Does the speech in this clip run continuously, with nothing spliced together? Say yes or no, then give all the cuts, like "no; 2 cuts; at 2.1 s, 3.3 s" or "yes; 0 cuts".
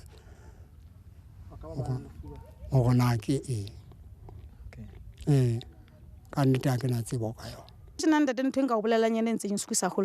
no; 1 cut; at 8.0 s